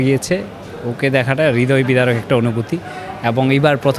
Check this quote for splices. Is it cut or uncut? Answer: uncut